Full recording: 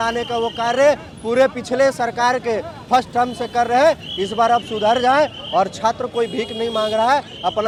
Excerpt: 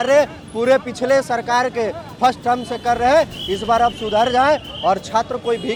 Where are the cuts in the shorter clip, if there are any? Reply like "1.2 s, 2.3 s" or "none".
none